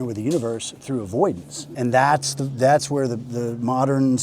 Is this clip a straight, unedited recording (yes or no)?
no